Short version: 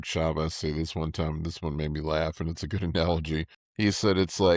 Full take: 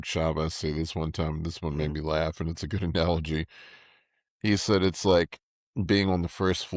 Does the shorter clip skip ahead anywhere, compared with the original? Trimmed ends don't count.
yes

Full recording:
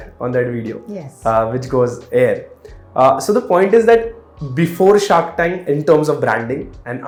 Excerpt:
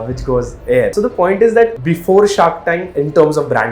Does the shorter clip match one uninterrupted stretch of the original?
no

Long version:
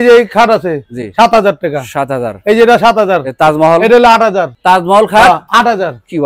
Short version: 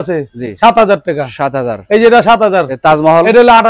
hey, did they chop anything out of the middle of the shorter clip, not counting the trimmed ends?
no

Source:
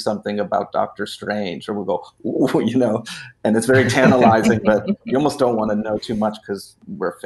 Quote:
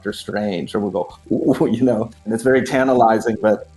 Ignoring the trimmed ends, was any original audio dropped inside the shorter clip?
yes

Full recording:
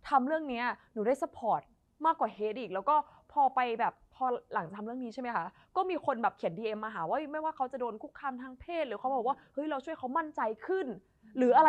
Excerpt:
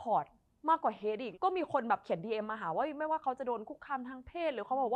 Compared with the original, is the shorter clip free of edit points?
no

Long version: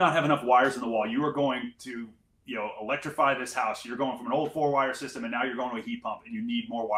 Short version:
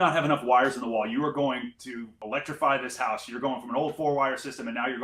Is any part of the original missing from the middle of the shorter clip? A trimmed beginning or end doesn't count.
yes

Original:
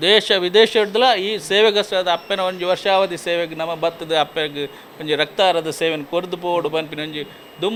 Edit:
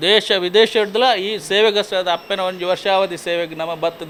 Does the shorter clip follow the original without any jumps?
yes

